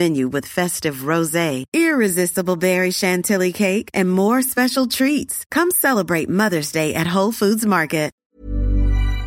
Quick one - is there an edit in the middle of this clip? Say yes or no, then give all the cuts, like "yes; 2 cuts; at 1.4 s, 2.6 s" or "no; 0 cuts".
yes; 1 cut; at 8.2 s